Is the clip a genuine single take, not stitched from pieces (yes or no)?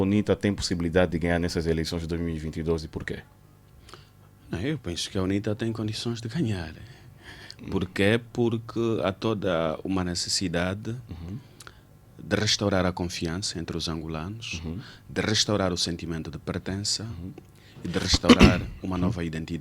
yes